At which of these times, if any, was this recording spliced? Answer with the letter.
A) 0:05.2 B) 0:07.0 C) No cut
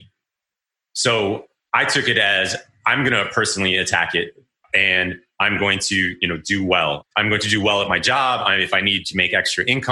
B